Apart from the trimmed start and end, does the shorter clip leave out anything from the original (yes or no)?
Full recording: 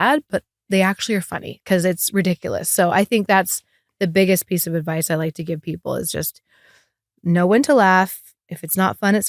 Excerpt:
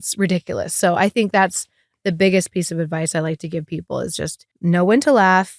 yes